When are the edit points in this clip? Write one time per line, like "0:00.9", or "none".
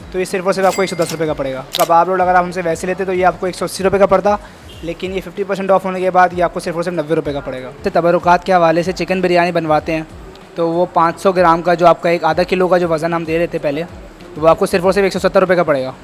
0:01.7
0:07.8